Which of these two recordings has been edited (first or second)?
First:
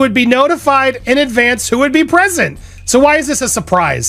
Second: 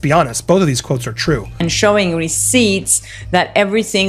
second